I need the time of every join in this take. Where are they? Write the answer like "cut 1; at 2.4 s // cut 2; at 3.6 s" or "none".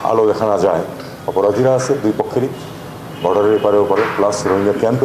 cut 1; at 1.0 s